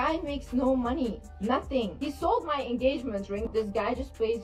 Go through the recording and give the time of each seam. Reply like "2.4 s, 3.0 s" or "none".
none